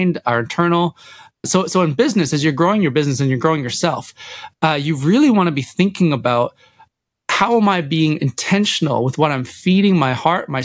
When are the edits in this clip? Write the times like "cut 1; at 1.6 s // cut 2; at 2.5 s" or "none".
cut 1; at 1.4 s